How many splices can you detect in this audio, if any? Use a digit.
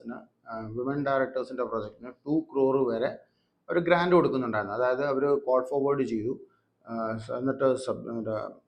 0